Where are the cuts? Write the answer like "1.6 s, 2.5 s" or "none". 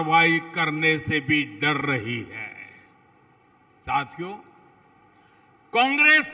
none

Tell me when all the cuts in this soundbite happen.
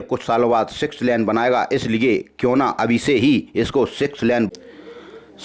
4.5 s

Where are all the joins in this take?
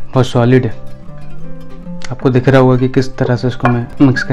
none

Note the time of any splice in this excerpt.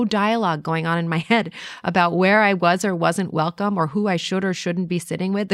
none

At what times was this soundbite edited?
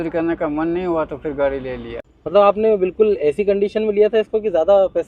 2.0 s

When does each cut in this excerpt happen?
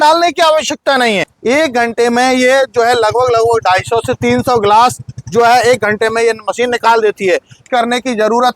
1.2 s, 7.6 s

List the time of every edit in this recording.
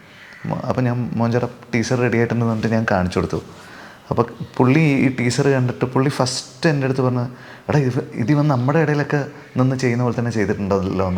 none

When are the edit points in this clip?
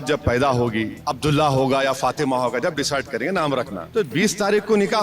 1.0 s, 3.9 s

